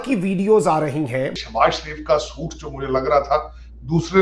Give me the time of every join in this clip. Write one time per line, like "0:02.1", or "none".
0:01.4